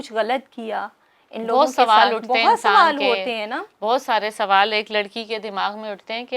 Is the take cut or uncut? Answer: uncut